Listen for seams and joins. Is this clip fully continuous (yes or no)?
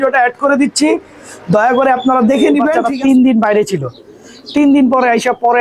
no